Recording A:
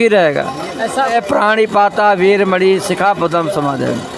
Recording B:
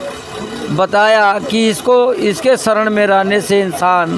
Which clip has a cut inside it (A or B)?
A